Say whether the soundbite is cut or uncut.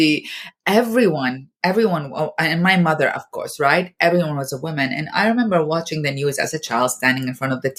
uncut